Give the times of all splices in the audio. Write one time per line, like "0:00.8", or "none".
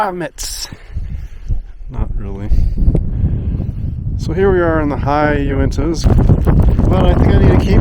0:06.0